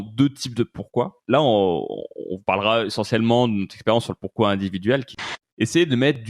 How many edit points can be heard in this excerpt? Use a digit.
2